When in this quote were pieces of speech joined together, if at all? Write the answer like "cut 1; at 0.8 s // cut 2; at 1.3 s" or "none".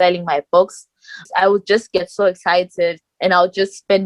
cut 1; at 1.3 s